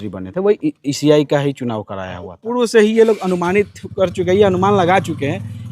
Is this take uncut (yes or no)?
no